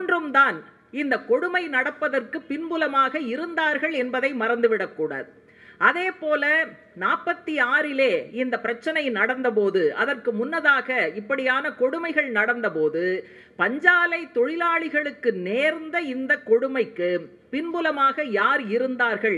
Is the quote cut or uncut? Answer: uncut